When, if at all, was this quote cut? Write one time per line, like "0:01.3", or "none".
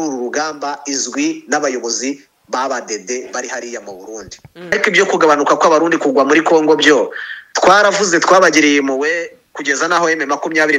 0:04.7

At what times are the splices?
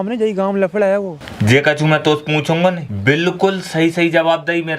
0:01.2
0:02.9

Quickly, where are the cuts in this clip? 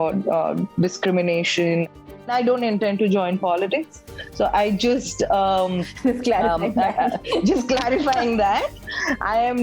0:01.8

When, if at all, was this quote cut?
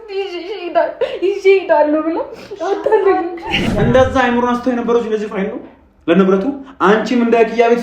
0:03.6

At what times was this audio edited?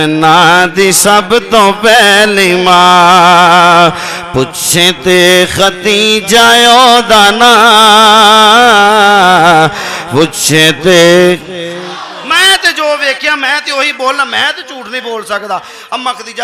0:12.1

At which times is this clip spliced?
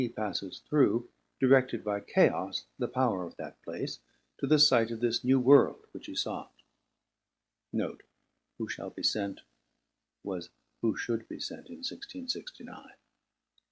0:04.4

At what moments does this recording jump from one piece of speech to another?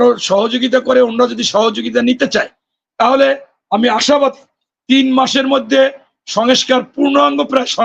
none

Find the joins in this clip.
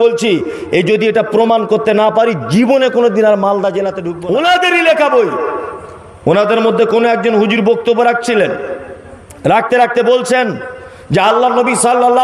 0:04.0

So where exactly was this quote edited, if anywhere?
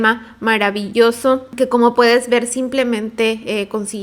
0:01.5

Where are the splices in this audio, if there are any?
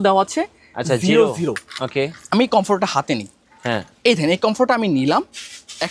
none

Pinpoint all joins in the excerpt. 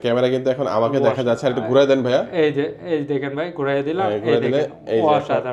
none

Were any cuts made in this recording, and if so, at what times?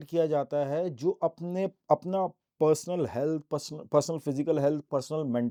none

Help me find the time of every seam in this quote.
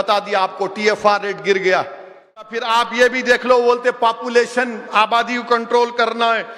0:02.6

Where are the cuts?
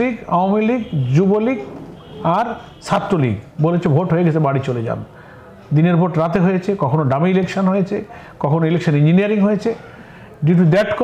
none

